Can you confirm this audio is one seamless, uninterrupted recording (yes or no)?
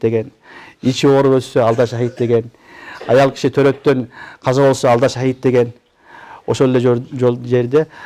yes